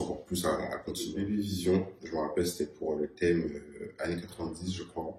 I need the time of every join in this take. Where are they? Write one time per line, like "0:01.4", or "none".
0:01.2